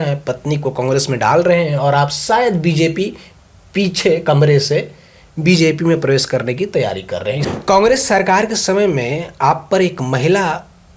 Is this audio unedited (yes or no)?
no